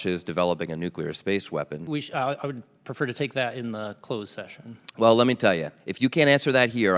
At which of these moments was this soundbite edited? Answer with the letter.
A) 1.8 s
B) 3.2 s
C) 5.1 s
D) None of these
A